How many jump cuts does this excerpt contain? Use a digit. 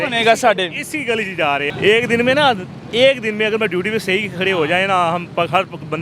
1